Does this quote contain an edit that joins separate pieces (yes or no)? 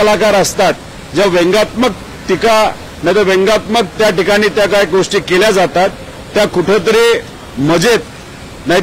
no